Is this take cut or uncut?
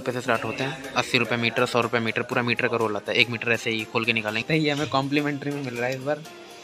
cut